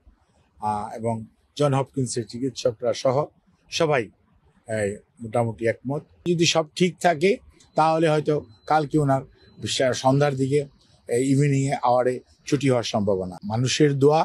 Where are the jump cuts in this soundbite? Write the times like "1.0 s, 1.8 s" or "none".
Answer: 6.3 s, 13.3 s

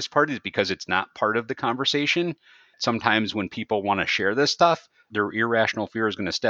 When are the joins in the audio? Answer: 2.8 s, 5.1 s

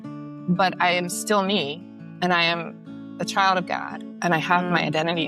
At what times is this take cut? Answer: none

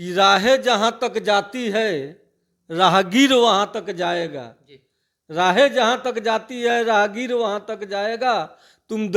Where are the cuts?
none

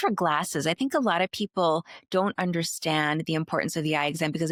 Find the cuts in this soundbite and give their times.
none

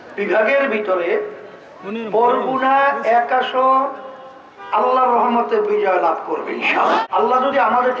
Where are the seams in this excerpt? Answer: 7.0 s

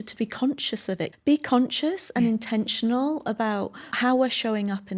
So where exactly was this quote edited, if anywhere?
1.1 s, 3.9 s

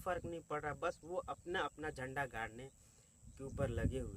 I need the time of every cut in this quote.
none

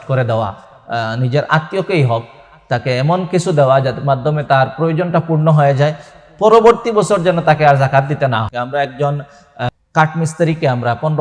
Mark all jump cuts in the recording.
8.5 s, 9.7 s

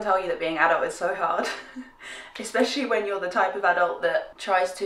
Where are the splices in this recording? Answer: none

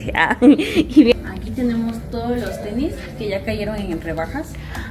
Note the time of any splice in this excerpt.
1.1 s

